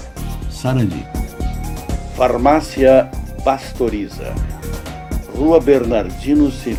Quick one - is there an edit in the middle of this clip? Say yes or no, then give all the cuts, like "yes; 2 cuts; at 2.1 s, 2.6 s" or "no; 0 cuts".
no; 0 cuts